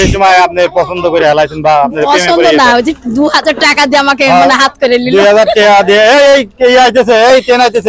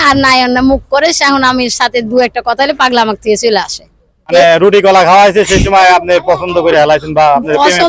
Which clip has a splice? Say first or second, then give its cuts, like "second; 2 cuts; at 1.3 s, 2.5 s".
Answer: second; 1 cut; at 4.3 s